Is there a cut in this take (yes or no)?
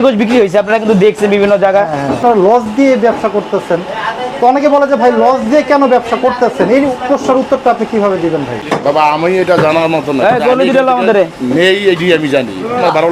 yes